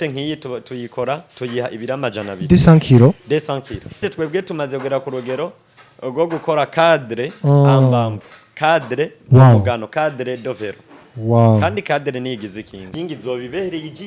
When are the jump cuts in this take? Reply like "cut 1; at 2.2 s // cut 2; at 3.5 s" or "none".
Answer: cut 1; at 4.1 s // cut 2; at 12.8 s